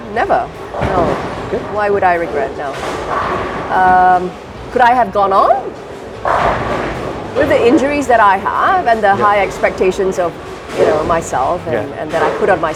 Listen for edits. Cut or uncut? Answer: uncut